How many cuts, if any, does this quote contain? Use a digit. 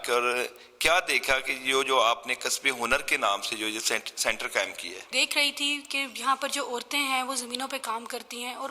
1